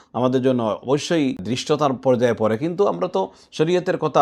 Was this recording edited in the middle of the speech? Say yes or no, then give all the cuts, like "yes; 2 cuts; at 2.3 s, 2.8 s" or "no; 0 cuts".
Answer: yes; 1 cut; at 1.5 s